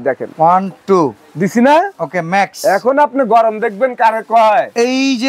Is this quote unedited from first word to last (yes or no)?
yes